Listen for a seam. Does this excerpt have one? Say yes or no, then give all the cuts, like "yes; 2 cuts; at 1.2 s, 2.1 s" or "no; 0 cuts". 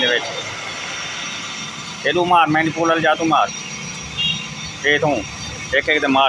no; 0 cuts